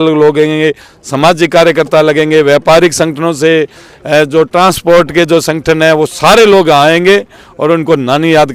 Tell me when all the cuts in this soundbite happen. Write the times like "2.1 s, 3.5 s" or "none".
none